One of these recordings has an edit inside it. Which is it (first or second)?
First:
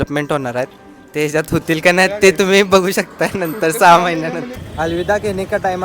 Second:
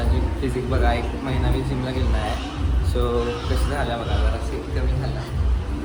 first